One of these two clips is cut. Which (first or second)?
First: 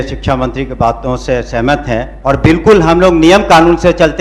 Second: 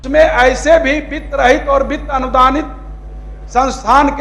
first